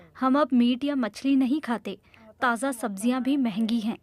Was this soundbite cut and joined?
no; 0 cuts

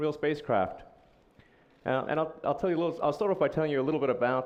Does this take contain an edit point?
no; 0 cuts

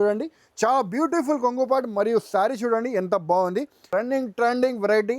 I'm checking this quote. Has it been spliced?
yes; 1 cut; at 3.9 s

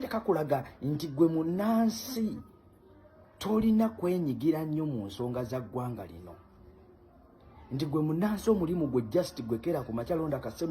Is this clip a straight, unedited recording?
no; 1 cut; at 4.1 s

